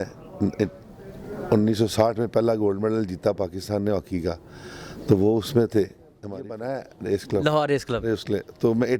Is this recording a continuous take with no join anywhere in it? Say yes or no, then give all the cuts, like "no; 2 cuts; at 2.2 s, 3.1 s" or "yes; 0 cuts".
no; 1 cut; at 6.2 s